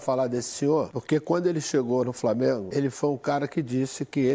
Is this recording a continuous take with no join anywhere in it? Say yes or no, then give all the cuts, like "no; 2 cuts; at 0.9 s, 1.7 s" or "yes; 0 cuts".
no; 2 cuts; at 1.0 s, 2.7 s